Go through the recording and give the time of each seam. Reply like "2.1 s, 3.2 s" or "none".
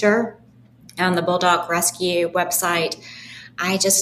none